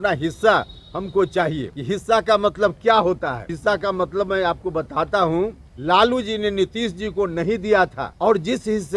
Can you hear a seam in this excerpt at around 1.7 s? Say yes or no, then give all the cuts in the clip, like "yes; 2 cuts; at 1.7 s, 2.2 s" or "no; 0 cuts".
yes; 4 cuts; at 1.7 s, 3.5 s, 5.7 s, 8.0 s